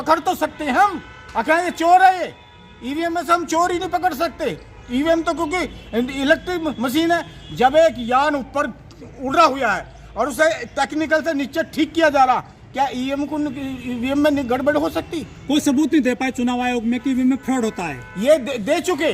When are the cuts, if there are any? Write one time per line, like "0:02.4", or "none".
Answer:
none